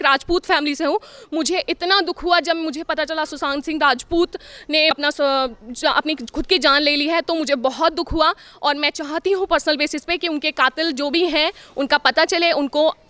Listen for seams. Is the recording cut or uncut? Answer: uncut